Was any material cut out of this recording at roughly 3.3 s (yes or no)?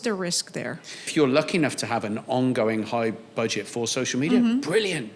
no